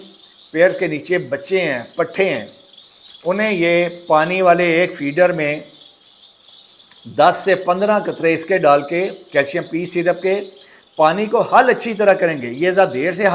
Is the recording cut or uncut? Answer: uncut